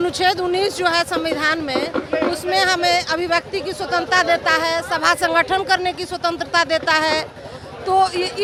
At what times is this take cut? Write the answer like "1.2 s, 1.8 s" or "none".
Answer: none